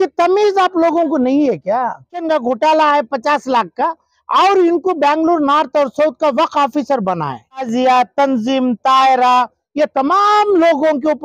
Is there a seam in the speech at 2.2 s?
yes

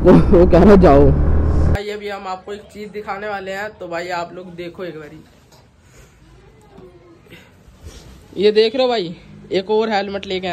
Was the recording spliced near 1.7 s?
yes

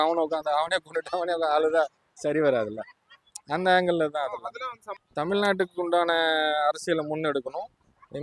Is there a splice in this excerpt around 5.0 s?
yes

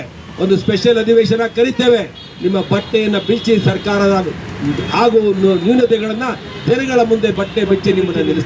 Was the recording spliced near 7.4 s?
yes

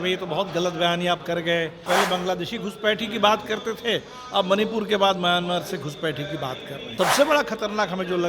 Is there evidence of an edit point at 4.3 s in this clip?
no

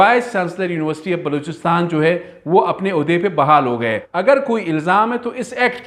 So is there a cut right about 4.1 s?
yes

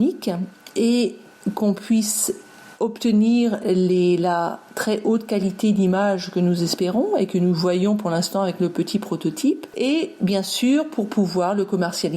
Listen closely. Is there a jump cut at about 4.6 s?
no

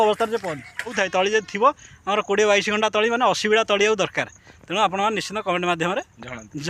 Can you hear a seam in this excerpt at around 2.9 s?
no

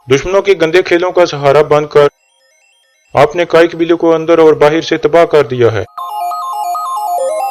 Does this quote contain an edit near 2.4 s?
no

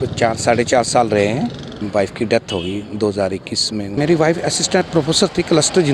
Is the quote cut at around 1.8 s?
yes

